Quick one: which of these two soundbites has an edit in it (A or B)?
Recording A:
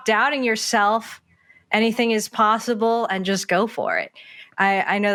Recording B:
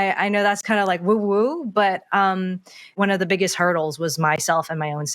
B